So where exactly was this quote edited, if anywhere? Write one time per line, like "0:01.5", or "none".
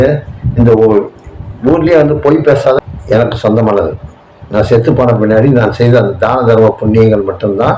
0:02.8

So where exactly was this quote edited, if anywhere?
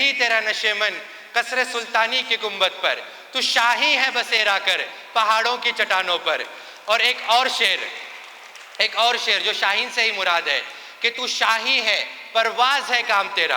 none

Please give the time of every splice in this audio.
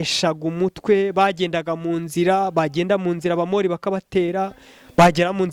none

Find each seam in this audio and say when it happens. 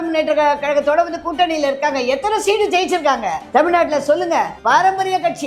0:03.4
0:04.6

